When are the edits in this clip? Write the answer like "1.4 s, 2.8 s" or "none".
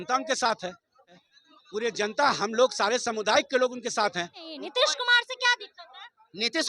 1.3 s, 4.5 s